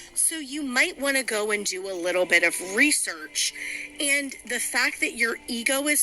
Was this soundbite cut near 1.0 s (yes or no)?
yes